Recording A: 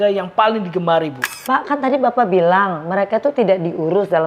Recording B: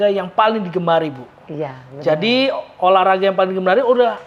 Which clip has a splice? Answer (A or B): A